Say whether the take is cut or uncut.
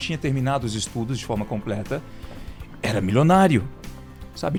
uncut